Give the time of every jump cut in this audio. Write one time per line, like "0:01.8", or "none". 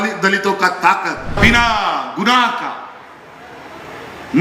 0:01.4